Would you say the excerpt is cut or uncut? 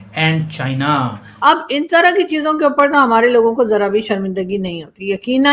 cut